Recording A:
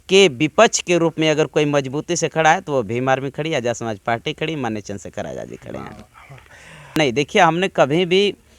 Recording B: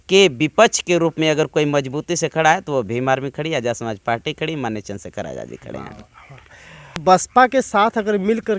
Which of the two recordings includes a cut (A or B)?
A